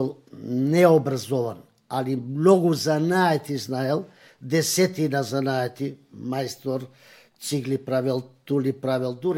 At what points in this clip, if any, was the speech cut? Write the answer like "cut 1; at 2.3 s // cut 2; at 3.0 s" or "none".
none